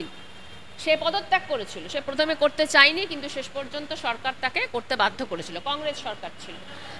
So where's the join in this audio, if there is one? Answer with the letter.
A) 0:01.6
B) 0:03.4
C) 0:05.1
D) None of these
D